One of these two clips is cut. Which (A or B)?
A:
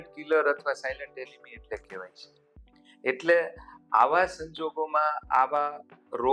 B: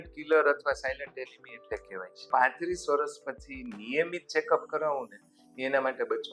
B